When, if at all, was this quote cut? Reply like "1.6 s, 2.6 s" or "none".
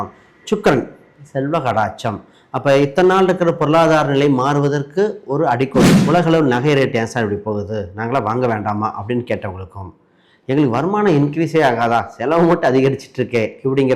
6.0 s